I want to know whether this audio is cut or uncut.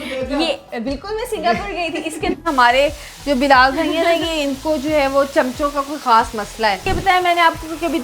cut